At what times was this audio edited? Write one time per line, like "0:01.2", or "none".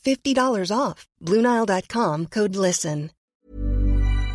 0:03.2